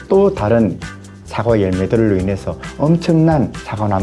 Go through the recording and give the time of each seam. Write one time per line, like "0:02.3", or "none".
none